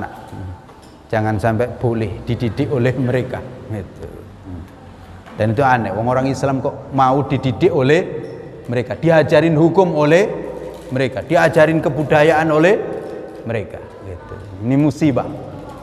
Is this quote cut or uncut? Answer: uncut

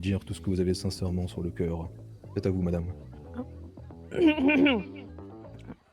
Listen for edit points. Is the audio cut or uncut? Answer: uncut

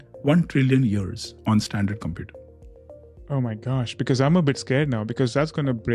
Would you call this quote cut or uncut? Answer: uncut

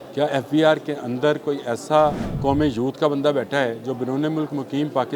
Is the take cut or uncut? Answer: cut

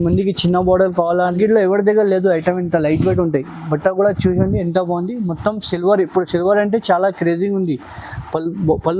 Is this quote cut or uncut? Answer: cut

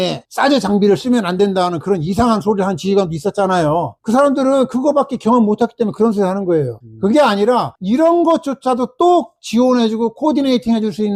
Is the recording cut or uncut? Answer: uncut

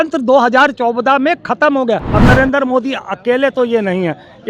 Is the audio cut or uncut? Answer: cut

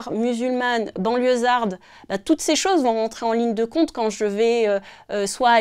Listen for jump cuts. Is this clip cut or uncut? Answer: uncut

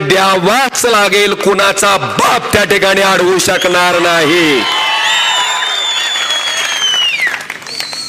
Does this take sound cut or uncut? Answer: uncut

